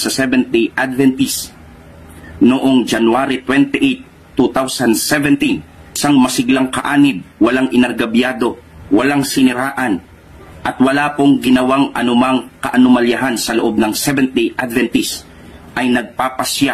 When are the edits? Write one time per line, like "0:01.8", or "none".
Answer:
none